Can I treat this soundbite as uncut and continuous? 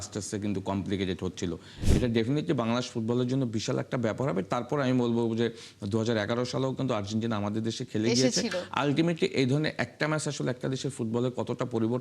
no; 1 cut; at 1.8 s

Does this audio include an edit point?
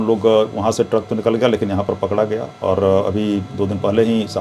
no; 0 cuts

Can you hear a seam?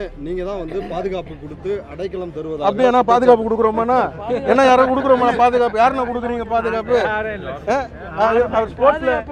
no; 0 cuts

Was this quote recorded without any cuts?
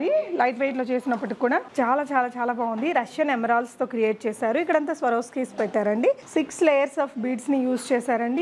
no; 2 cuts; at 1.7 s, 6.2 s

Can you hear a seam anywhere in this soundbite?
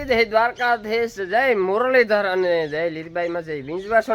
no; 0 cuts

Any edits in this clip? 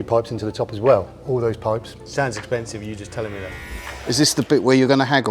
yes; 1 cut; at 4.1 s

